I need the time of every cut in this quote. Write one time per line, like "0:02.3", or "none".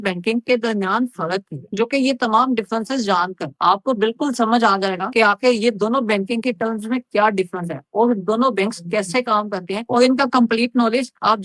none